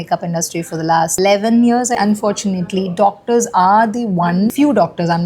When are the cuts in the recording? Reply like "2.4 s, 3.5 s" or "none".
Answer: 1.2 s, 2.0 s, 4.5 s